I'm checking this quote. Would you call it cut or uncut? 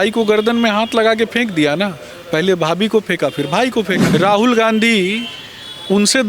cut